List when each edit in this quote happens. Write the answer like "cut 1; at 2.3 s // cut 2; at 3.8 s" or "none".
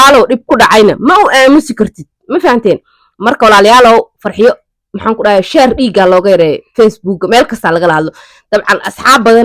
none